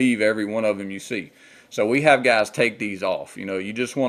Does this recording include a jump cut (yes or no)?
no